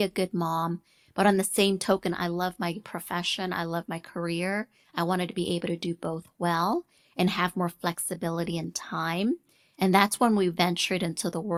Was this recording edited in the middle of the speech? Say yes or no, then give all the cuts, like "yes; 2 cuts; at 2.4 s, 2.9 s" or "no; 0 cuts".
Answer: no; 0 cuts